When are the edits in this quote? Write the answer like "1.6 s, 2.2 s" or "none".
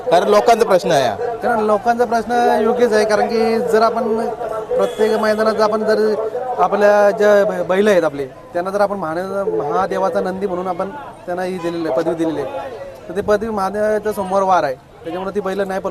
none

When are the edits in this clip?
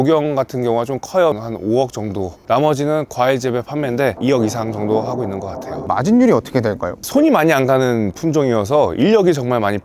1.4 s, 4.1 s, 5.9 s

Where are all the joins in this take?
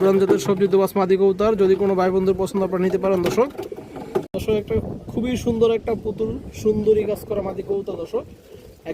4.4 s

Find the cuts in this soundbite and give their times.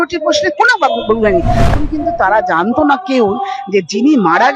1.7 s

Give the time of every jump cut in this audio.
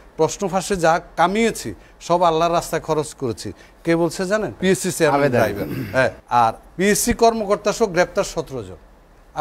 4.5 s, 6.2 s

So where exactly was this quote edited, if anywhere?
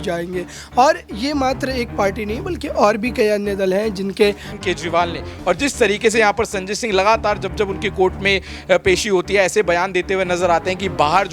4.5 s

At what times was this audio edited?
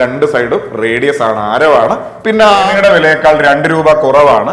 2.7 s

